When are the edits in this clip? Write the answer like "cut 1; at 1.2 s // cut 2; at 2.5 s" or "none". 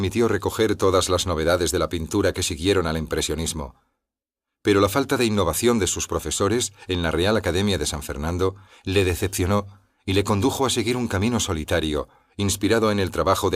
cut 1; at 10.7 s